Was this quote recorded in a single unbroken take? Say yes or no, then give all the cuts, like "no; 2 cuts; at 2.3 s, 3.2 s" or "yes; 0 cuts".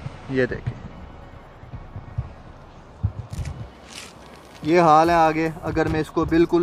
yes; 0 cuts